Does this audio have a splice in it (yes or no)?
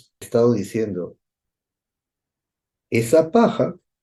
no